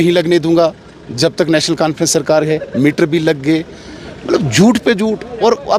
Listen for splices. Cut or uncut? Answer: uncut